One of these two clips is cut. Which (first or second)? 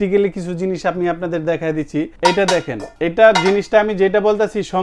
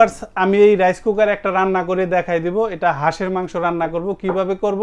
first